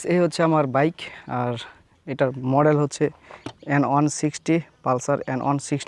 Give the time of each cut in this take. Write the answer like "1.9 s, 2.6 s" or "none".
1.2 s